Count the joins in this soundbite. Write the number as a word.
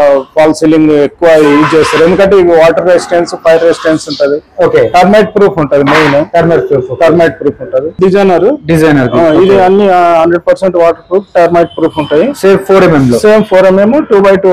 one